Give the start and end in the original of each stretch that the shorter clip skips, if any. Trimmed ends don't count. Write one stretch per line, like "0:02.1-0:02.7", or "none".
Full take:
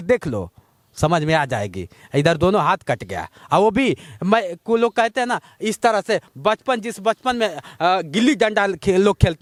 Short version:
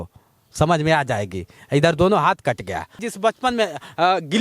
0:03.4-0:06.8